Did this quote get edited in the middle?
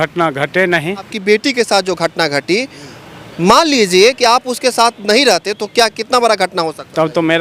yes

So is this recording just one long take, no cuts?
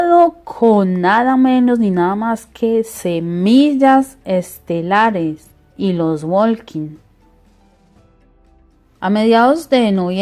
no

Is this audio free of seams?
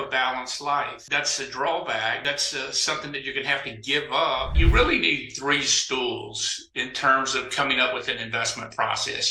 no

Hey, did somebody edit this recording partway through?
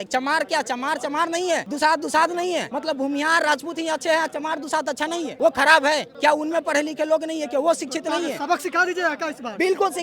yes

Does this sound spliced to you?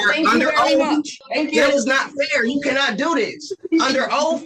yes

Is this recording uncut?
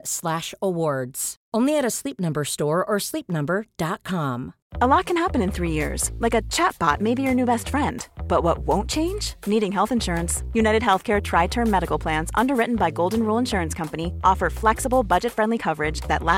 no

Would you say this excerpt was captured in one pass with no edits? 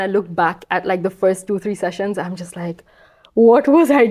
yes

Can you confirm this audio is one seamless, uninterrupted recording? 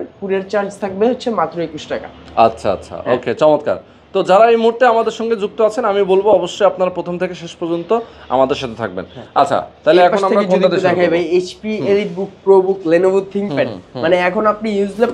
yes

